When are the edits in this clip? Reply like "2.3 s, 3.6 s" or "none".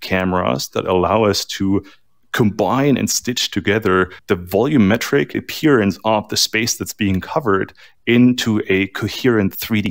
4.2 s, 5.4 s